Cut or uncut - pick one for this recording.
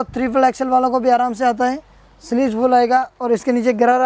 uncut